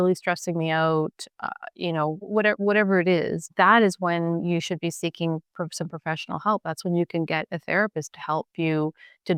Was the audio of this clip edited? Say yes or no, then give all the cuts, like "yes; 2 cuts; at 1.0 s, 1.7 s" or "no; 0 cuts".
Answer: no; 0 cuts